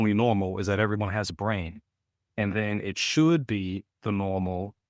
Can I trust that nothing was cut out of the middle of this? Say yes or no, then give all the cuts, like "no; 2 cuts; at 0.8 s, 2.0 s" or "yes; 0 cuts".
yes; 0 cuts